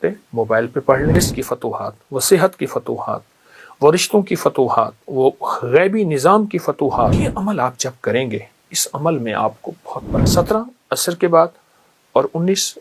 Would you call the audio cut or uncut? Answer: cut